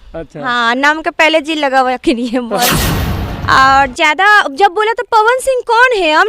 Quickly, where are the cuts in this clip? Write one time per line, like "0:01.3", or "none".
0:03.0